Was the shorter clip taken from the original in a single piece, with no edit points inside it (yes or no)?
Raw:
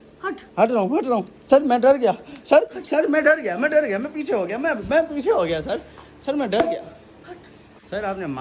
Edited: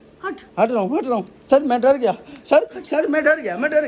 yes